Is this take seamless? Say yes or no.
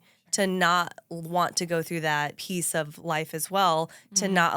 no